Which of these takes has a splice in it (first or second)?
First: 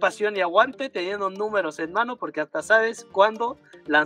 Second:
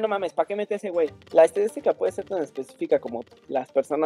second